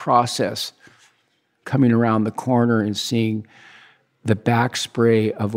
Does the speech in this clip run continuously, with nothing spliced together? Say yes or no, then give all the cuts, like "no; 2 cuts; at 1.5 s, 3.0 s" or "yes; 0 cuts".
yes; 0 cuts